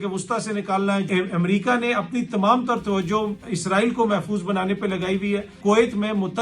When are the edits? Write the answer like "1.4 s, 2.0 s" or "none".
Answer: 1.1 s, 5.6 s